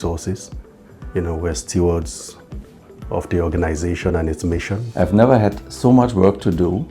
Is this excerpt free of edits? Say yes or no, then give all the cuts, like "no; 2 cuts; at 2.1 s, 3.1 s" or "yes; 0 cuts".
no; 1 cut; at 4.8 s